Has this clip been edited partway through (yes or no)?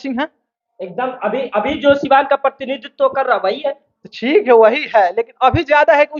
no